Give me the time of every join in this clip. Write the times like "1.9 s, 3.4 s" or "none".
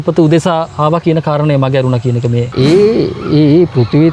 2.5 s